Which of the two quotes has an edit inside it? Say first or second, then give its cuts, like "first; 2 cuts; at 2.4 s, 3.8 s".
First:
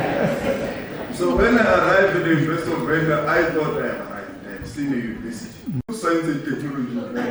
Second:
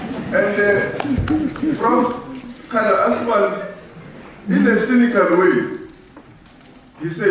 first; 1 cut; at 5.9 s